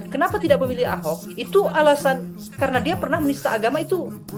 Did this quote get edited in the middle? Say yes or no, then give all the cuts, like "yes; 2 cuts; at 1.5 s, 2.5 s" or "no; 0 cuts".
no; 0 cuts